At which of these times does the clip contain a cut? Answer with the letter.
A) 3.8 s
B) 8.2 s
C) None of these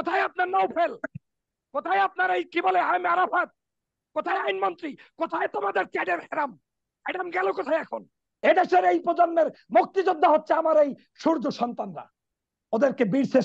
B